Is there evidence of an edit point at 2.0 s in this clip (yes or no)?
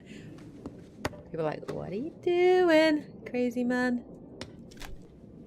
no